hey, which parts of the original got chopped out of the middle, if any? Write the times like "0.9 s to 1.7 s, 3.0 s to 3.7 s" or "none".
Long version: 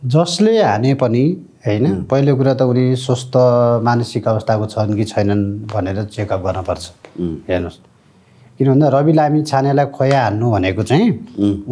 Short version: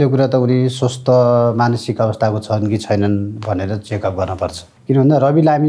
6.9 s to 8.4 s

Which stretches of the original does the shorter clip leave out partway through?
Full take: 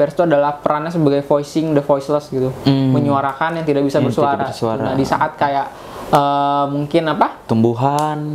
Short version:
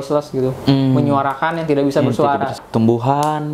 4.6 s to 7.3 s

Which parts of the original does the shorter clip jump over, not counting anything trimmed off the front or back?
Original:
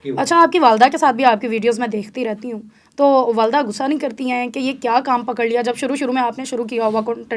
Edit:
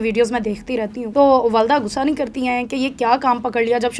2.5 s to 2.8 s

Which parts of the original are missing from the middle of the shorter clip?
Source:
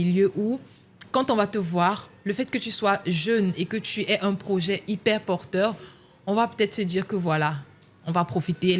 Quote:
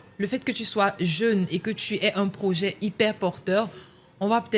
none

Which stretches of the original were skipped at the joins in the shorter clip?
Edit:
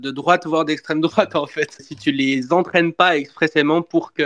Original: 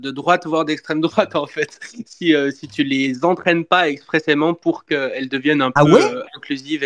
1.9 s to 2.6 s

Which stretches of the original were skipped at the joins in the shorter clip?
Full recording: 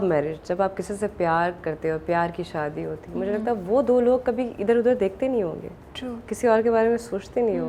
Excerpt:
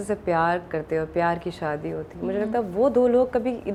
none

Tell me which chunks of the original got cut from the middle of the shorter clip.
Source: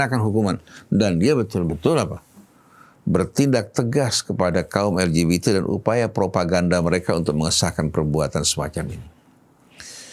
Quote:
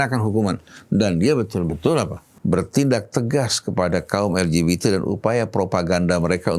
2.2 s to 2.9 s

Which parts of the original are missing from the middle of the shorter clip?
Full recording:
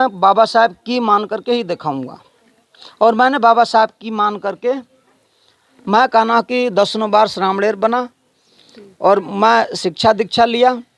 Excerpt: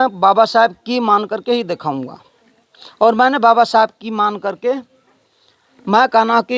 none

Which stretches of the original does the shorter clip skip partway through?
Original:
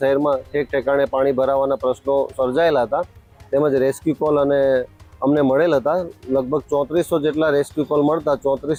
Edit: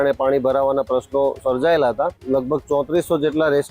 3.1 s to 6.2 s

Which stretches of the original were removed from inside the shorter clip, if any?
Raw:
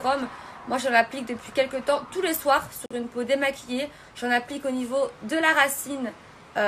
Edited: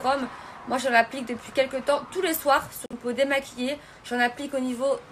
2.9 s to 3.0 s

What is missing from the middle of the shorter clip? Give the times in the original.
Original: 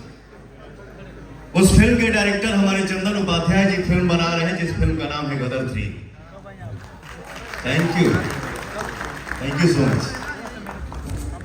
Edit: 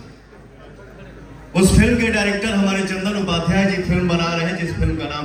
none

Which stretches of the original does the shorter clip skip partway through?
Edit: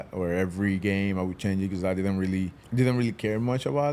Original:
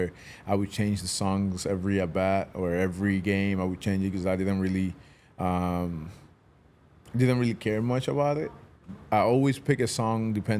5.0 s to 7.0 s

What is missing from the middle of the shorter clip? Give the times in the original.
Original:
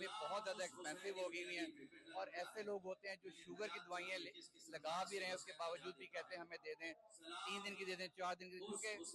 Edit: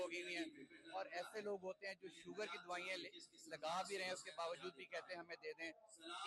none

